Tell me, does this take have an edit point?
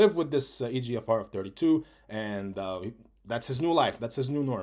no; 0 cuts

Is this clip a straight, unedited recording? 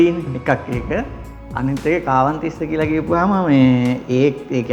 yes; 0 cuts

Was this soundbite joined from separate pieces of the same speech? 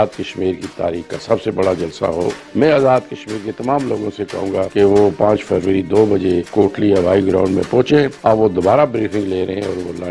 yes; 4 cuts; at 2.4 s, 4.7 s, 6.5 s, 8.1 s

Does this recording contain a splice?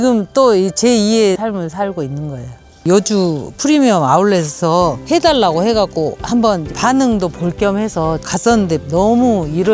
yes; 1 cut; at 2.8 s

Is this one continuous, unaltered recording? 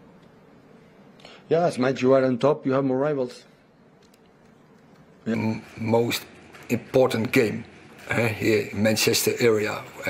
no; 1 cut; at 5.4 s

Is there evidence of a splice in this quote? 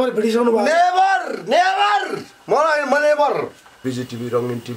yes; 1 cut; at 3.8 s

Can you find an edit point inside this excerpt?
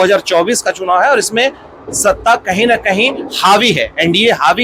no; 0 cuts

